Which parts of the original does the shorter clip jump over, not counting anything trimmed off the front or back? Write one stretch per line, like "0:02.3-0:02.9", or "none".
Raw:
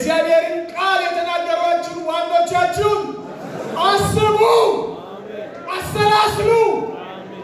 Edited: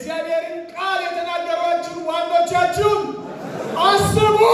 none

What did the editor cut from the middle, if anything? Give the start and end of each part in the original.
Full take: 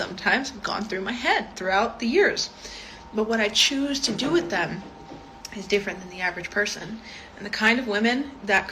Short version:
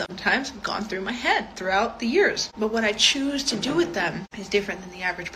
0:02.4-0:03.0
0:04.9-0:05.5

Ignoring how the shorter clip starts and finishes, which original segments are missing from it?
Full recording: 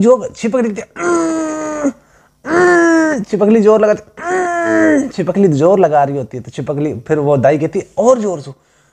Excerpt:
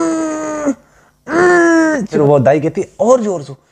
0:03.3-0:07.1

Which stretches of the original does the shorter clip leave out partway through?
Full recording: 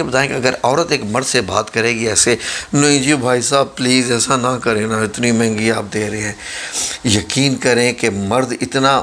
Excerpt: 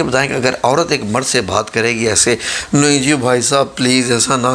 none

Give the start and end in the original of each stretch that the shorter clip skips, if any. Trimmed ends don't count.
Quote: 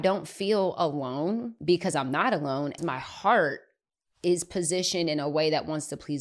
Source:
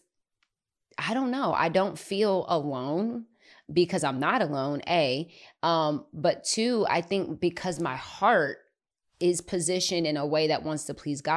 0:03.2-0:03.6
0:04.8-0:07.7

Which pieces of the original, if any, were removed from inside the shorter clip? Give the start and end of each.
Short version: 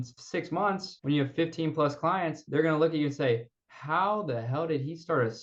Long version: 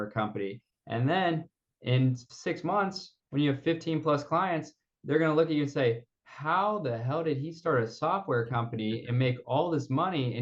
0:03.0-0:03.2
0:04.7-0:05.0

